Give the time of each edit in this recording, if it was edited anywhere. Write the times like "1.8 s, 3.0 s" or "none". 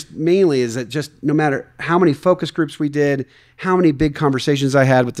none